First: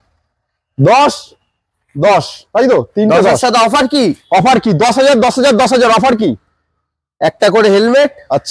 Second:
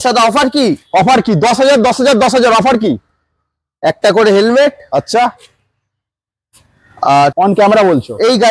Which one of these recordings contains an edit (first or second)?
second